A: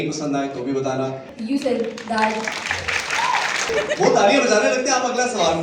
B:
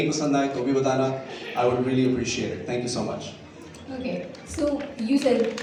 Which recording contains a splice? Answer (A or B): A